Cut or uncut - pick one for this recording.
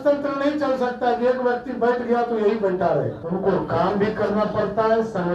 cut